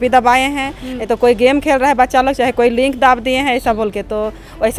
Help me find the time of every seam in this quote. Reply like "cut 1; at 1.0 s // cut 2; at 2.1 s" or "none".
none